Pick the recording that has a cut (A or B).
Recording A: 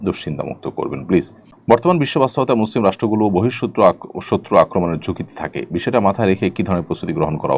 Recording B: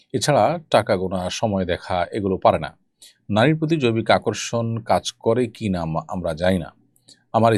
A